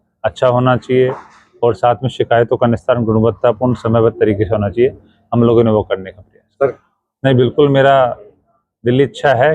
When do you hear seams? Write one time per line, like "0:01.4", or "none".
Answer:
0:06.8